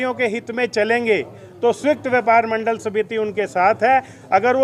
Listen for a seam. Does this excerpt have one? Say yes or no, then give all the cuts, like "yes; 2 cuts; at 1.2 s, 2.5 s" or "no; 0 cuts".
no; 0 cuts